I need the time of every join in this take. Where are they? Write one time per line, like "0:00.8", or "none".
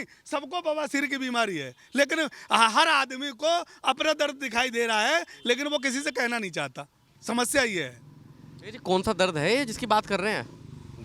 none